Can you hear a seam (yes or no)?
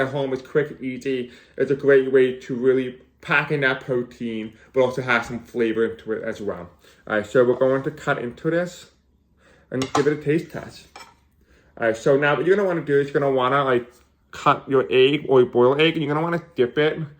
no